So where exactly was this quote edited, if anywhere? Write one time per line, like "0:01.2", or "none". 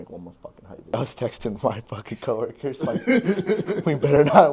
0:00.9